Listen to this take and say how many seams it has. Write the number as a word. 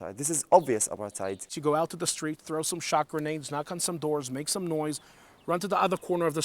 one